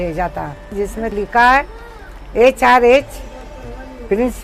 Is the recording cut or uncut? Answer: cut